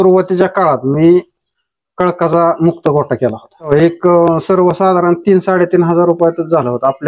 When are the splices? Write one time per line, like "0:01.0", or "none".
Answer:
0:03.7

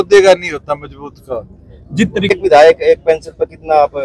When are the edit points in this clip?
0:02.3

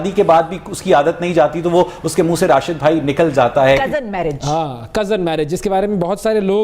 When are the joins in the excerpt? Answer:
0:03.8

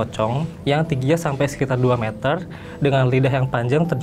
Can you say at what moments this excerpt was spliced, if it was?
none

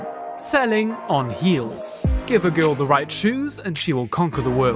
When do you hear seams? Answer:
none

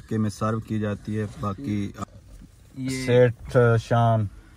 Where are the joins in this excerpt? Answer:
0:01.9

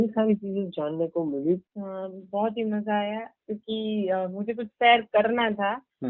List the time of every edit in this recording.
0:01.6

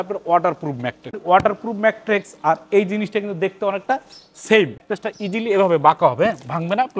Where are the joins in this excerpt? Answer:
0:01.2
0:04.9

